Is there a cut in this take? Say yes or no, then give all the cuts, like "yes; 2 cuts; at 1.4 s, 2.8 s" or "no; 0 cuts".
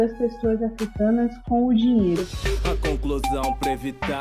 yes; 1 cut; at 2.4 s